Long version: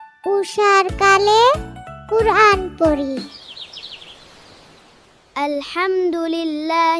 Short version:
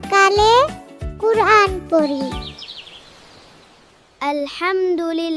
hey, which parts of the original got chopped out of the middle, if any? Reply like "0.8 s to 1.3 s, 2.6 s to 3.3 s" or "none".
3.3 s to 3.5 s